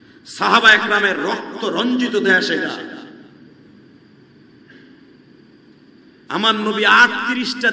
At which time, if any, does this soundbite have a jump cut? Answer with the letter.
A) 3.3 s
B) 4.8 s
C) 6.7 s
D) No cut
D